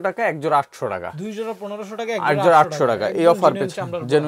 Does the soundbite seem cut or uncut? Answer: uncut